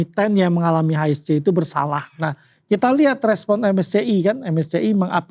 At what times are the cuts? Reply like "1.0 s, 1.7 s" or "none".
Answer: 2.1 s